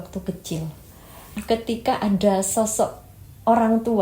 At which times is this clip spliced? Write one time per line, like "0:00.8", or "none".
0:01.4